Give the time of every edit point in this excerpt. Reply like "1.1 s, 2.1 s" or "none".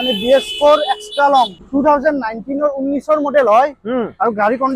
1.6 s